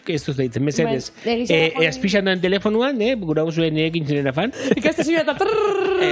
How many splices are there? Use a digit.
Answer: 1